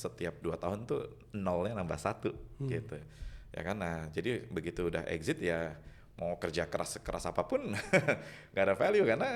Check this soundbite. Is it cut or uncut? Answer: uncut